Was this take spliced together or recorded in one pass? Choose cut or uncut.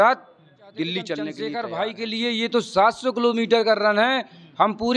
cut